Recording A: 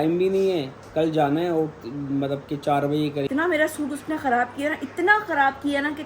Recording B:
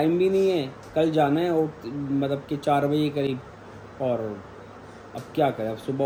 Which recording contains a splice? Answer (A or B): A